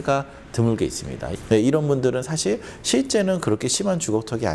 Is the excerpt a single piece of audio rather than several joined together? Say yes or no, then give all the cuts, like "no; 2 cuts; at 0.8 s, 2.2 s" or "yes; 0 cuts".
no; 1 cut; at 1.4 s